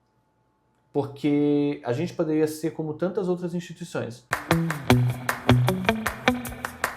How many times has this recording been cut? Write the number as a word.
one